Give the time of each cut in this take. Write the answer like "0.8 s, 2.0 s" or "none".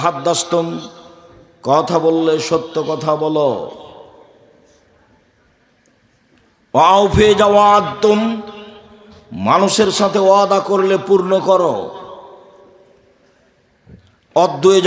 none